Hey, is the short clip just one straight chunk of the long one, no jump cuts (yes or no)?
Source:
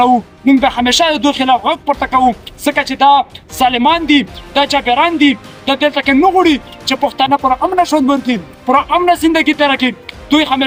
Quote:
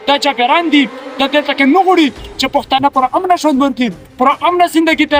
yes